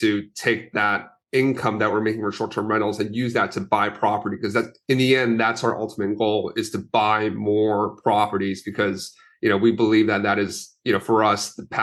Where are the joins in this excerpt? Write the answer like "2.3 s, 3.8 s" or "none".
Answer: none